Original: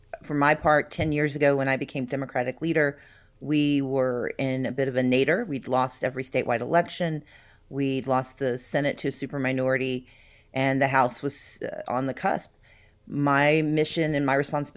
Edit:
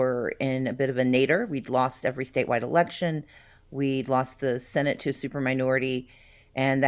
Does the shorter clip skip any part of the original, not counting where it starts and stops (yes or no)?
no